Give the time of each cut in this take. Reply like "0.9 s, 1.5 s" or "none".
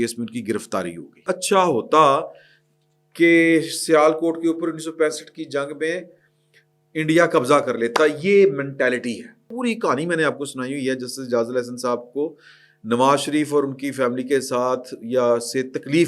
1.3 s, 9.5 s